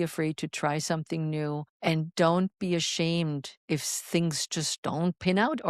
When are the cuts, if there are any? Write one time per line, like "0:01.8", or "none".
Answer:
0:01.7
0:03.5